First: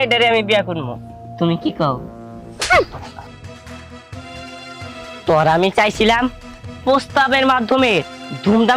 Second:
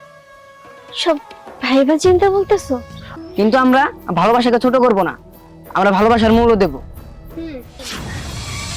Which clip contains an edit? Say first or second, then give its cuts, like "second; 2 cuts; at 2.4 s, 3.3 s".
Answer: second; 1 cut; at 3.0 s